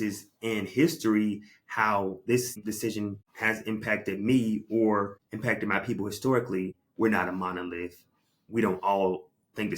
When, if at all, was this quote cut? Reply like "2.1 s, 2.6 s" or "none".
2.7 s, 5.2 s, 6.8 s